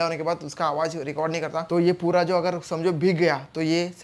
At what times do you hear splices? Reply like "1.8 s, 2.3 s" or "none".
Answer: 1.7 s